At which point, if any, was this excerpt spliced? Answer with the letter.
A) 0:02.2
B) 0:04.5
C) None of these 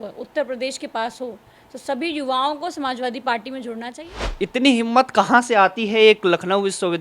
B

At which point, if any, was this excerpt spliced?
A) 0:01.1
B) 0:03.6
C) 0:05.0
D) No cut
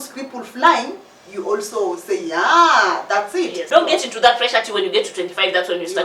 B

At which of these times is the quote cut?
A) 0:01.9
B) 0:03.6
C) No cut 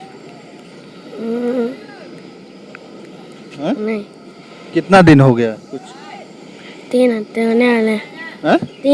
C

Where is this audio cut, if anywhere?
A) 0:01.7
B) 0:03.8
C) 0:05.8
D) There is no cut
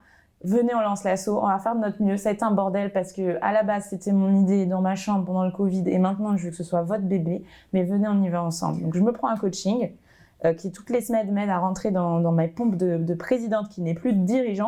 D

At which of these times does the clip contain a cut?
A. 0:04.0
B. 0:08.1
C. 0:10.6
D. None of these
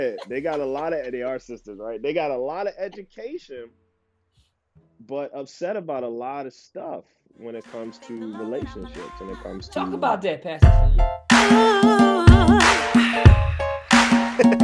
C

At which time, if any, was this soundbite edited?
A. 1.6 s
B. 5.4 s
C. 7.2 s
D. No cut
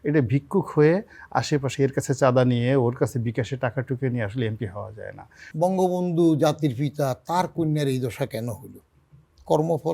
B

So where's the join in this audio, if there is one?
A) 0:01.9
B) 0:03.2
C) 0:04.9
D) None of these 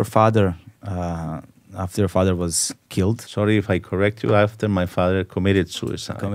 B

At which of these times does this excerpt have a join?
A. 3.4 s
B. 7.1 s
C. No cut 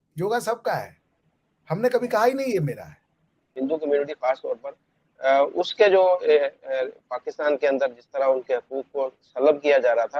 A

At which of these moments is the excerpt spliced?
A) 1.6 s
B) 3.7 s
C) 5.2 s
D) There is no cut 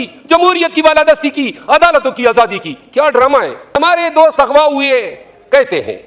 B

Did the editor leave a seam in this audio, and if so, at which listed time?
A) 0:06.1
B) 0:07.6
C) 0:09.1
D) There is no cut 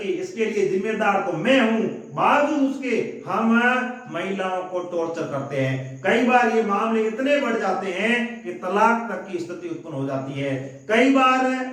D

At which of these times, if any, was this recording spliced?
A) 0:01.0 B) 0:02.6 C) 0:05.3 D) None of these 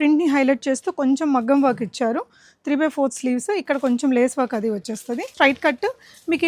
C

